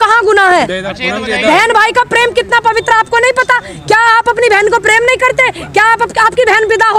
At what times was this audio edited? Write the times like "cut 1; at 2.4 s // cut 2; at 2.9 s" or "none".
none

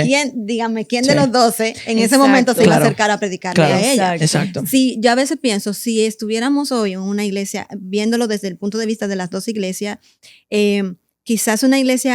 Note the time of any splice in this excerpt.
none

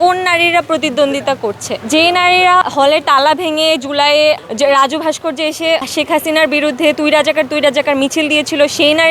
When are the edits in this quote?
cut 1; at 2.6 s // cut 2; at 5.9 s

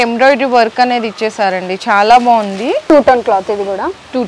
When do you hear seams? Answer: cut 1; at 2.8 s

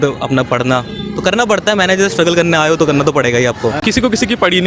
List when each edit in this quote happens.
cut 1; at 3.8 s

